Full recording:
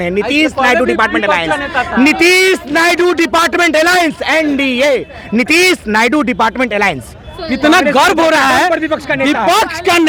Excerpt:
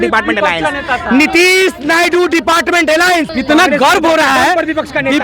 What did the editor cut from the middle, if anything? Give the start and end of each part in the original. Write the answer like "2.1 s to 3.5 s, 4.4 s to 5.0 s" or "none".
4.2 s to 7.4 s